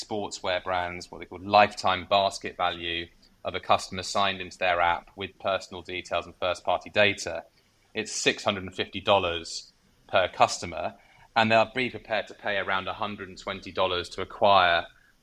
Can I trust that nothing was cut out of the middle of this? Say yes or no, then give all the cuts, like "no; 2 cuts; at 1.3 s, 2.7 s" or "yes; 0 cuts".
yes; 0 cuts